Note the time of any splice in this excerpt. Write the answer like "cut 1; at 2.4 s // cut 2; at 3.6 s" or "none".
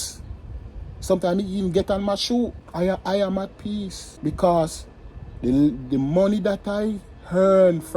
cut 1; at 2.6 s // cut 2; at 4.0 s

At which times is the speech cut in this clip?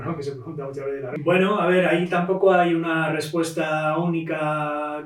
cut 1; at 1.1 s

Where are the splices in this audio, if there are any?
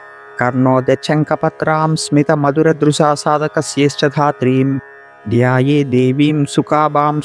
none

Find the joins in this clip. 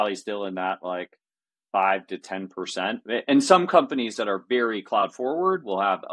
none

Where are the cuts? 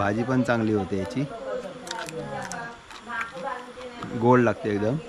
none

